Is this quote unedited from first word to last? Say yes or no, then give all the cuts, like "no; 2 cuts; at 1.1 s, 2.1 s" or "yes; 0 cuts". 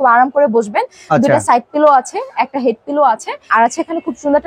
no; 1 cut; at 3.5 s